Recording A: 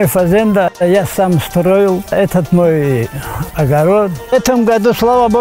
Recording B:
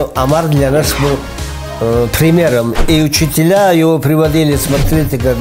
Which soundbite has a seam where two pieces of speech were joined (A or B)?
A